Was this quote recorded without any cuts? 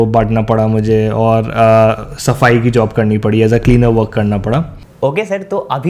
no; 1 cut; at 4.8 s

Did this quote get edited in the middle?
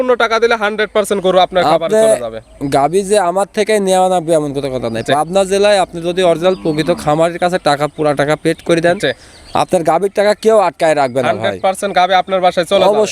no; 0 cuts

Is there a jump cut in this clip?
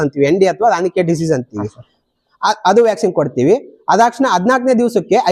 no; 0 cuts

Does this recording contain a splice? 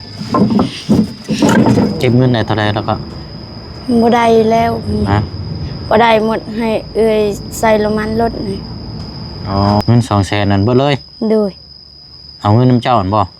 yes; 2 cuts; at 2.0 s, 9.8 s

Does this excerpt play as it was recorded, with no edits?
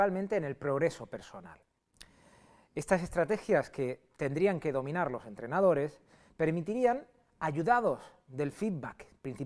no; 1 cut; at 7.1 s

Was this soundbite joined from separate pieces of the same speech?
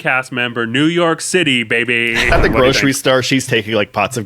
yes; 1 cut; at 2.3 s

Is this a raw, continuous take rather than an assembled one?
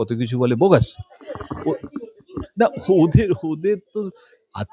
yes; 0 cuts

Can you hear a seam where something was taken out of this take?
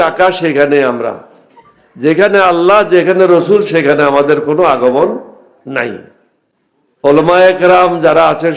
yes; 1 cut; at 7.1 s

